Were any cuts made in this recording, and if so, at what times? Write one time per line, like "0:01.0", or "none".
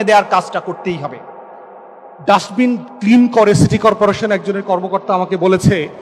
0:02.1